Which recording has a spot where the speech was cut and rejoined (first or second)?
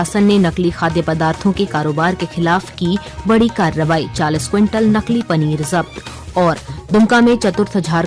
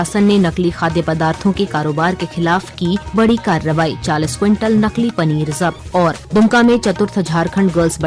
second